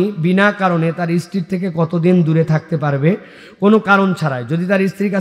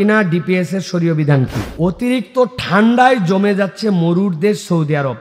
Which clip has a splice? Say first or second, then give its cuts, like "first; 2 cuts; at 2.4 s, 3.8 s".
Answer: second; 1 cut; at 1.7 s